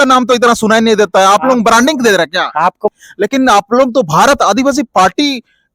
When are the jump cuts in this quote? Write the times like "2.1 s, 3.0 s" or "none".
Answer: 2.9 s

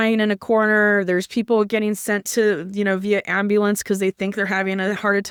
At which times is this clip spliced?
none

